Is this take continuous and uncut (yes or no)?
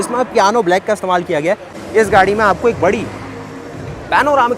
no